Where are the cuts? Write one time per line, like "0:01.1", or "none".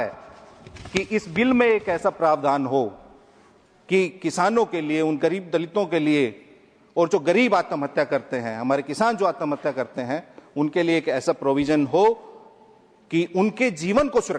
none